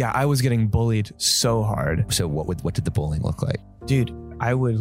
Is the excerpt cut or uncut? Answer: cut